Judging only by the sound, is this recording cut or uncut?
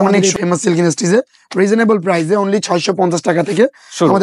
uncut